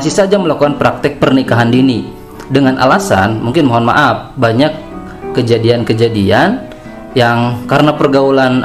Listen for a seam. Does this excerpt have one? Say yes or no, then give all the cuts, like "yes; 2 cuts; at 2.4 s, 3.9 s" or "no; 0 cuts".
no; 0 cuts